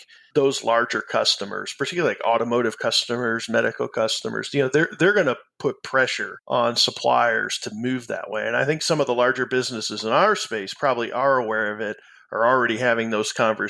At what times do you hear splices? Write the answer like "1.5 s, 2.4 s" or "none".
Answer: 8.8 s